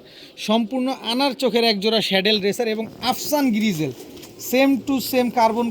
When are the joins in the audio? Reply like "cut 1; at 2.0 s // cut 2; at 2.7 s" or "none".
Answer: none